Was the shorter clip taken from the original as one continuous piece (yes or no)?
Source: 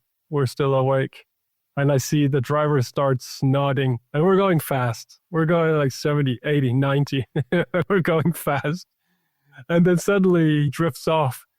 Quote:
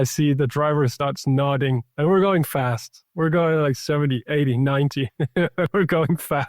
no